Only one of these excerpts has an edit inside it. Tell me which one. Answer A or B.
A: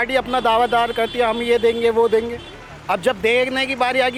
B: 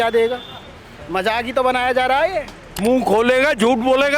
B